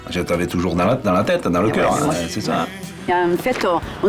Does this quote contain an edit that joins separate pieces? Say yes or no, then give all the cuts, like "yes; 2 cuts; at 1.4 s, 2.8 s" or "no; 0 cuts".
yes; 1 cut; at 2.9 s